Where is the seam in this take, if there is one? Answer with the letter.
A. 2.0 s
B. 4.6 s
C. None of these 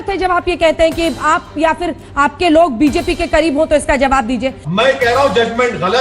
B